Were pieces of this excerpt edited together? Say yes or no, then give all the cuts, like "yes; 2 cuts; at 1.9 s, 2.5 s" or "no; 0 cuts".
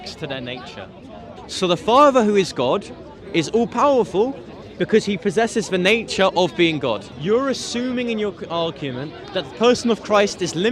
yes; 2 cuts; at 1.3 s, 7.1 s